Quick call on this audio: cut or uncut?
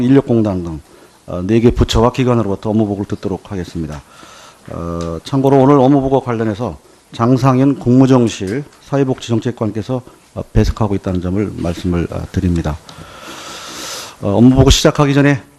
cut